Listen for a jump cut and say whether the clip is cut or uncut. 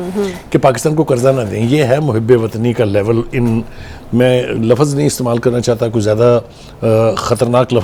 uncut